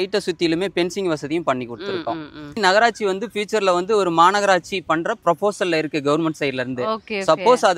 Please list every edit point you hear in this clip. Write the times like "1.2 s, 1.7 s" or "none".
2.6 s